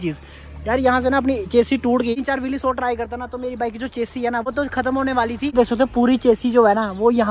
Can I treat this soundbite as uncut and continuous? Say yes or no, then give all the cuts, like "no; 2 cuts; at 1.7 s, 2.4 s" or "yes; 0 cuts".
no; 2 cuts; at 2.1 s, 5.5 s